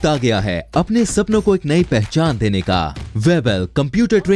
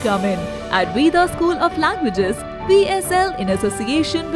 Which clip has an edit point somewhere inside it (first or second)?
first